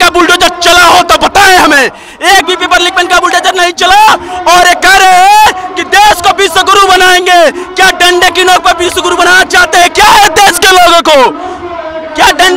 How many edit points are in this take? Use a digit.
0